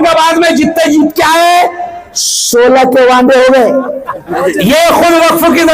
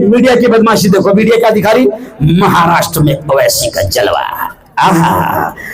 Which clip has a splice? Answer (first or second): first